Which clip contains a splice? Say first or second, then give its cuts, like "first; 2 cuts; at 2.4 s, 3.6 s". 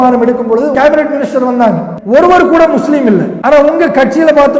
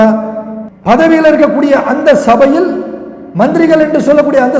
first; 3 cuts; at 0.7 s, 1.9 s, 3.3 s